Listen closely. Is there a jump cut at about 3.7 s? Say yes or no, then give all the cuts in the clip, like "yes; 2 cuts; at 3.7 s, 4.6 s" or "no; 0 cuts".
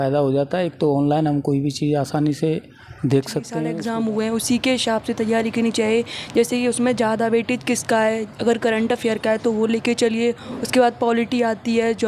yes; 1 cut; at 3.7 s